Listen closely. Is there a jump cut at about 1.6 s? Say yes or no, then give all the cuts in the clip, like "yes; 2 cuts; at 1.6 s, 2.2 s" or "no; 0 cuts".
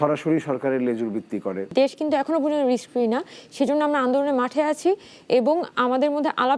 yes; 1 cut; at 1.6 s